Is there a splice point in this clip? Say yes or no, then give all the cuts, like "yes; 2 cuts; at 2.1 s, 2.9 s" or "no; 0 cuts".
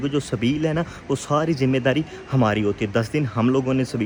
no; 0 cuts